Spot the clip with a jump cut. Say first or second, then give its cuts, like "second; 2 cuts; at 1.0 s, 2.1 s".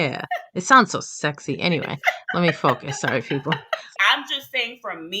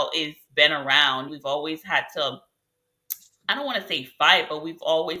first; 1 cut; at 3.9 s